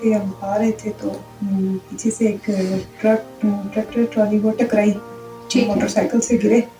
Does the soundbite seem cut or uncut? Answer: cut